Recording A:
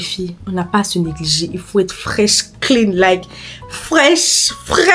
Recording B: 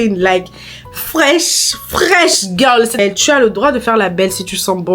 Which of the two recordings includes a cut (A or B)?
B